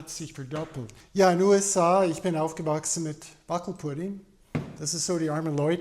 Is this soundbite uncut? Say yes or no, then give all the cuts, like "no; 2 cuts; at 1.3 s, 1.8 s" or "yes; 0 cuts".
no; 1 cut; at 1.0 s